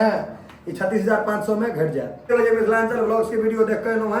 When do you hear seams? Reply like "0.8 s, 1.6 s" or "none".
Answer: 2.3 s